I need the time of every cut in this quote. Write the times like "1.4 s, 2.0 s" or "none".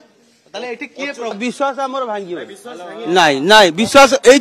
1.4 s